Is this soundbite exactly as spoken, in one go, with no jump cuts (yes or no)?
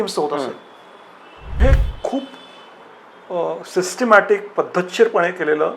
no